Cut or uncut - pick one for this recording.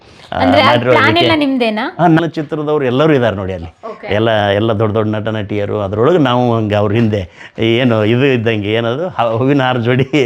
cut